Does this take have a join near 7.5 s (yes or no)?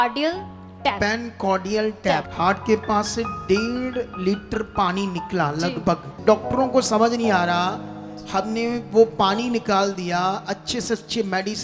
no